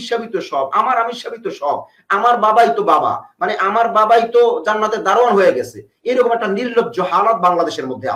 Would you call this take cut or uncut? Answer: uncut